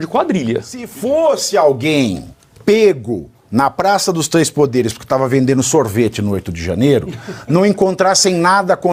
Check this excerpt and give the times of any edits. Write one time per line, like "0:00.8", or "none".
0:00.9